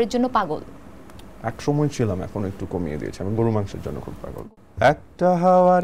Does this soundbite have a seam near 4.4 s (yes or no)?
yes